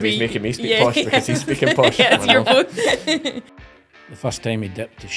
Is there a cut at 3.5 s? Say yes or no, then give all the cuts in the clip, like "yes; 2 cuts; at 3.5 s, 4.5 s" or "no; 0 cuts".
yes; 1 cut; at 3.5 s